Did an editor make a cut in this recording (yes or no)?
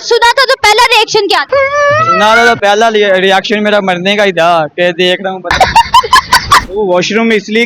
yes